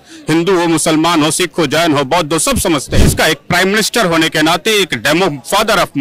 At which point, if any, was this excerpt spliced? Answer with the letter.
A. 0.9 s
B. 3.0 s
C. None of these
B